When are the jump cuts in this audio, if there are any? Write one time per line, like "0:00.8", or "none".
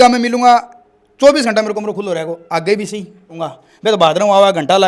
0:03.4